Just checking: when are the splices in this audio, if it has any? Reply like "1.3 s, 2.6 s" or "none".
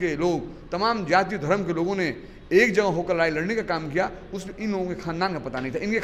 none